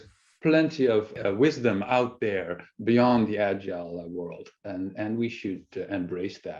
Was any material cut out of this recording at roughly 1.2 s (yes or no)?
yes